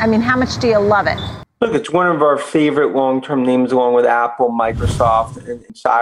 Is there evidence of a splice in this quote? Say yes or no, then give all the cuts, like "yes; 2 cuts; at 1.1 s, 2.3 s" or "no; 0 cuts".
no; 0 cuts